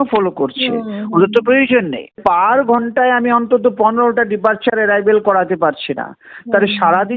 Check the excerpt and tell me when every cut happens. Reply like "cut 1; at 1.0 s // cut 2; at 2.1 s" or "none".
cut 1; at 2.2 s